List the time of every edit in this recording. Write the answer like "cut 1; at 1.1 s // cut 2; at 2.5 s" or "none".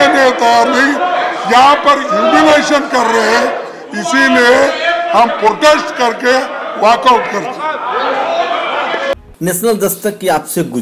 none